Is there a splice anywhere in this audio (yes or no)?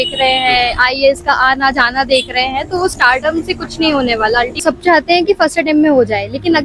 yes